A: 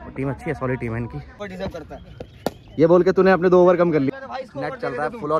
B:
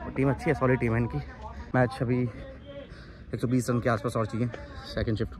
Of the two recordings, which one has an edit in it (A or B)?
A